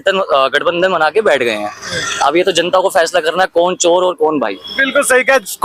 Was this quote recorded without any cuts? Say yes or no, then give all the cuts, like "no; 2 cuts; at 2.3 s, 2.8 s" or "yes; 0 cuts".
yes; 0 cuts